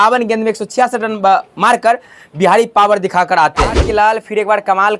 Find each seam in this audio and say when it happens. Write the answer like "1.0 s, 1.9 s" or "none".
3.8 s